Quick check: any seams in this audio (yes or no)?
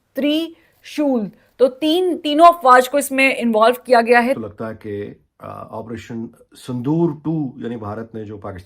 yes